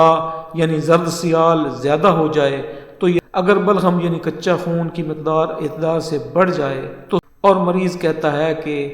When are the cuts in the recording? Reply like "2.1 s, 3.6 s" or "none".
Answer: 3.2 s, 7.3 s